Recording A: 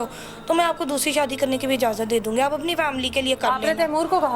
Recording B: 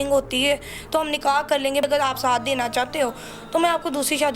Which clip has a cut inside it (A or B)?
B